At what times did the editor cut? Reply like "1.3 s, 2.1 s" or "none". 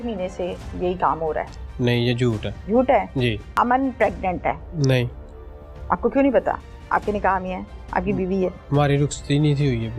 2.5 s, 3.5 s, 4.7 s